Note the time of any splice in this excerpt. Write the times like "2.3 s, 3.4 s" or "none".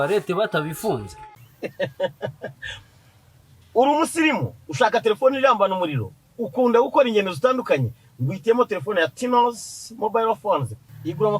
1.5 s